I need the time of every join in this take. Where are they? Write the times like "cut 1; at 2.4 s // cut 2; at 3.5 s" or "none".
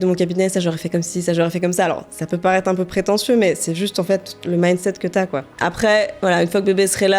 cut 1; at 5.5 s